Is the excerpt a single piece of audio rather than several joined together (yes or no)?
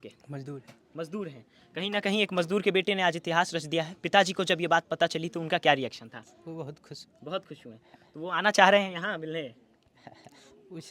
yes